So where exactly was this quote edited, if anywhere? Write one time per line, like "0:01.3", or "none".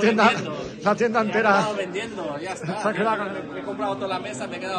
0:03.2